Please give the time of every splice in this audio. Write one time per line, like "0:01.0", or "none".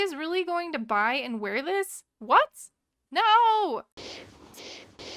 0:03.9